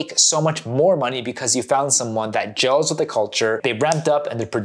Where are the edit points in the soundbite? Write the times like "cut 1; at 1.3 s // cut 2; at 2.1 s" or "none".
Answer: none